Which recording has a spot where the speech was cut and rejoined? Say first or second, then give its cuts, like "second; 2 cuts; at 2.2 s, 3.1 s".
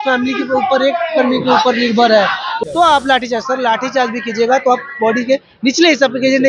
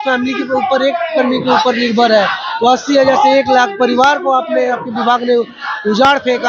first; 1 cut; at 2.5 s